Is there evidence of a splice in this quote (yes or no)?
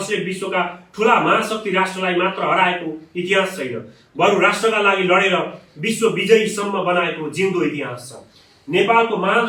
no